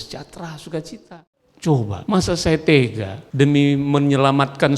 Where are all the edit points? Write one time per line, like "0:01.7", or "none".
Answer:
0:01.1

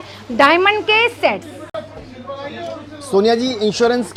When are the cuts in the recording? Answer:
none

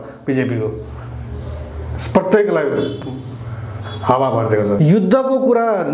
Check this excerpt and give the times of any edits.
0:04.8

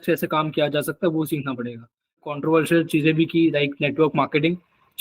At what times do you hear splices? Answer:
0:02.4

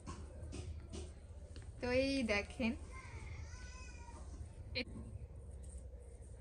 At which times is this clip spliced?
0:04.8

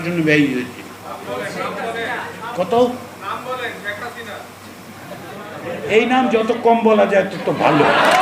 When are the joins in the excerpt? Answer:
none

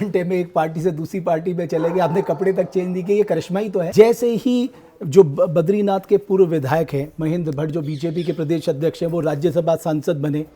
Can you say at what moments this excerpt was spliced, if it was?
0:03.9

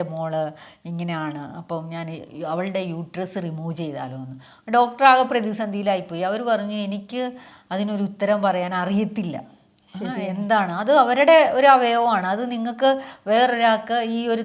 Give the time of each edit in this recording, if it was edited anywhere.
none

